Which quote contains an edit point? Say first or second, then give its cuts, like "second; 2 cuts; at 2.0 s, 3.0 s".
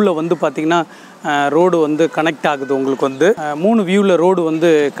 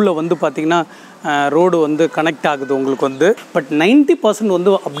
second; 1 cut; at 3.4 s